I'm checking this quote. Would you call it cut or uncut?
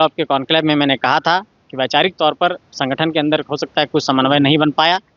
uncut